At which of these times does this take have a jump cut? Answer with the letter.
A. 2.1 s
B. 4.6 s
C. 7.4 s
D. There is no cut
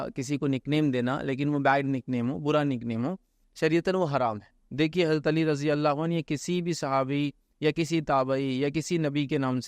B